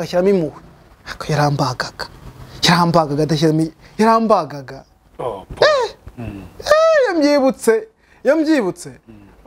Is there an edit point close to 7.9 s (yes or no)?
no